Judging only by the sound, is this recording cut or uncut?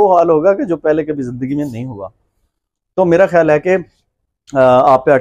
uncut